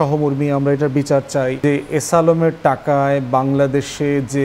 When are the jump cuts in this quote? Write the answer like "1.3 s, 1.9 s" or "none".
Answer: 1.6 s